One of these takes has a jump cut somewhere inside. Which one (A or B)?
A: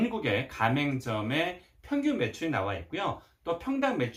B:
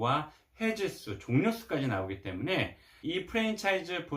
B